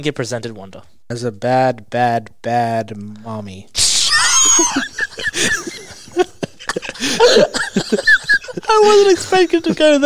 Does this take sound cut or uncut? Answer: cut